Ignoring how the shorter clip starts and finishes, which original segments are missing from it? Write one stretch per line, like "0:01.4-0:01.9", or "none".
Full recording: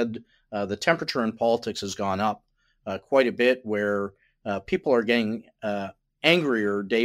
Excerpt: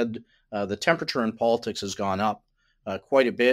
none

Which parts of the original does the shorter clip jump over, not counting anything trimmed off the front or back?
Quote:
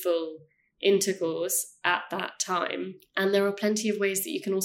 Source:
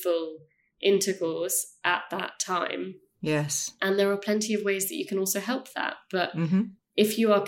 0:03.0-0:03.7

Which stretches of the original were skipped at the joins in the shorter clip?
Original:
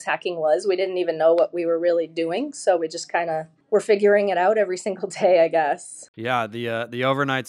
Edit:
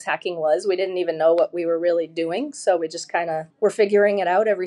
0:03.5-0:03.6

